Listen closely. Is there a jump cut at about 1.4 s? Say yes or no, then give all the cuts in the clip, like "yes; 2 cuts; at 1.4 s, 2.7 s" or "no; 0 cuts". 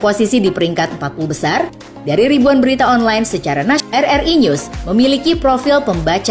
no; 1 cut; at 3.8 s